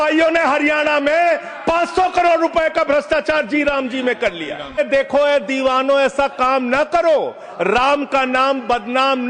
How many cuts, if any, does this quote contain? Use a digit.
1